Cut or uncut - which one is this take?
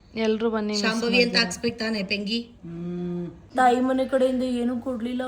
cut